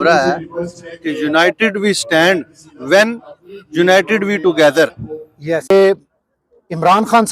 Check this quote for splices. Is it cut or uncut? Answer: cut